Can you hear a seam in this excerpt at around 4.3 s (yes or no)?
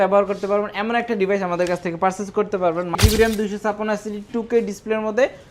no